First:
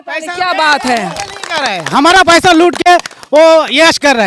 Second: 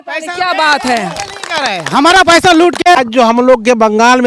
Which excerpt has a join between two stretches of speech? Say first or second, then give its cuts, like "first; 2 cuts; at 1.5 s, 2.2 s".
second; 1 cut; at 3.0 s